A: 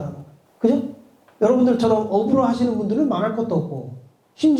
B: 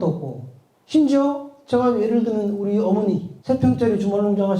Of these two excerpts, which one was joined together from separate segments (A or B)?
B